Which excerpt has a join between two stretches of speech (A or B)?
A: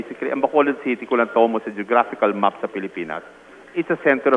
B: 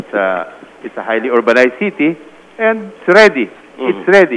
B